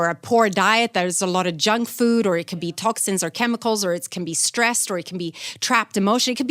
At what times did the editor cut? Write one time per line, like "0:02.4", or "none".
none